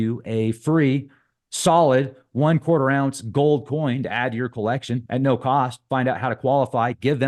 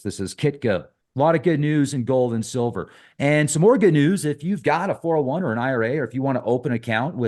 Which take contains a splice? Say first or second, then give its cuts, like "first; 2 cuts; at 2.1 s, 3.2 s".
second; 1 cut; at 1.0 s